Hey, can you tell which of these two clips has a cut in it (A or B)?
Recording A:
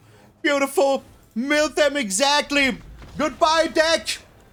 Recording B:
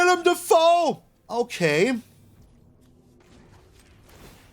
B